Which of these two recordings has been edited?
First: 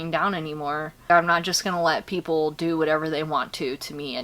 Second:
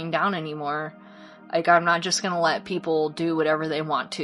first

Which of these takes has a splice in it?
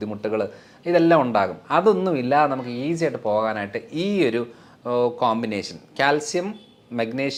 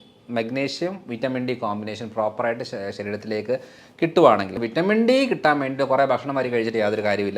second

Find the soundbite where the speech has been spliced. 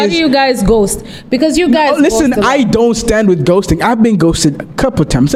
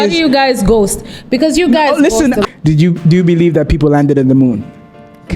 second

